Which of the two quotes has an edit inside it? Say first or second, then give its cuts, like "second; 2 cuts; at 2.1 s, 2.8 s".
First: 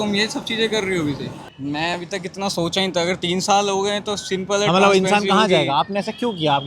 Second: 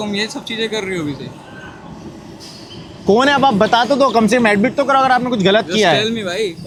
first; 1 cut; at 1.4 s